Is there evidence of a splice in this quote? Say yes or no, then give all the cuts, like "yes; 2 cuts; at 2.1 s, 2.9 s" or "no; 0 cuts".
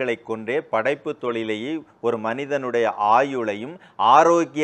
no; 0 cuts